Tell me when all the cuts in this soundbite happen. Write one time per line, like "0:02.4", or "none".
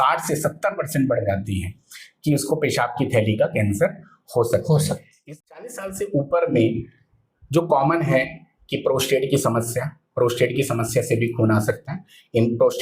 0:05.2